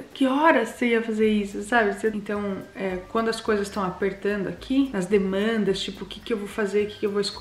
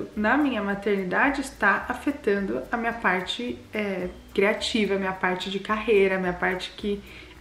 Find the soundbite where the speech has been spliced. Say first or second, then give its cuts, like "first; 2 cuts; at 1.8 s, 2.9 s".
first; 1 cut; at 2.2 s